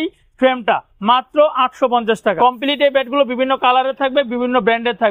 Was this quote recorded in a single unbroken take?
no; 1 cut; at 2.4 s

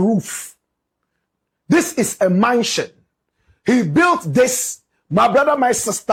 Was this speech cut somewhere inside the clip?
no; 0 cuts

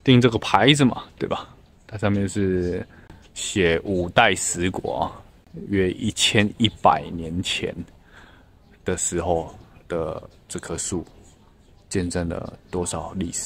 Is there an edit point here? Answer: no; 0 cuts

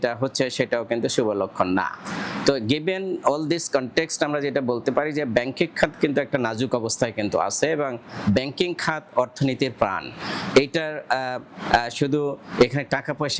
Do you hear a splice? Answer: no; 0 cuts

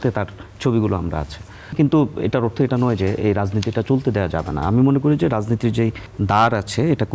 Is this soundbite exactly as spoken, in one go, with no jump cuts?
no; 2 cuts; at 1.7 s, 6.1 s

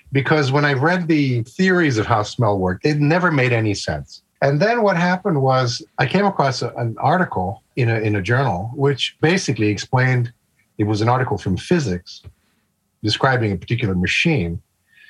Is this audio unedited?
no; 2 cuts; at 2.8 s, 6.7 s

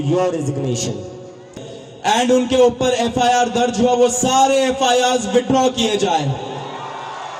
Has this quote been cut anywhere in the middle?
yes; 1 cut; at 1.5 s

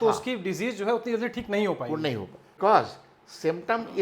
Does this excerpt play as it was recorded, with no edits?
no; 1 cut; at 2.5 s

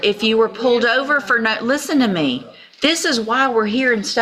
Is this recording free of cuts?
yes; 0 cuts

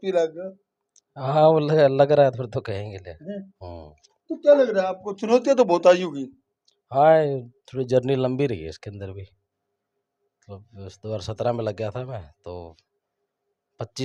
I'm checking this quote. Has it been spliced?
no; 0 cuts

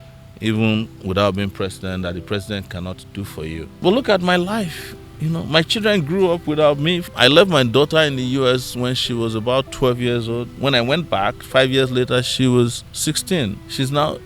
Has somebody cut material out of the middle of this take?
yes; 3 cuts; at 3.6 s, 7.1 s, 13.3 s

